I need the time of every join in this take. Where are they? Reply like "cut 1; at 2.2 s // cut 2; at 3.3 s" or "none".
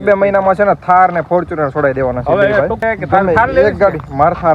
cut 1; at 2.8 s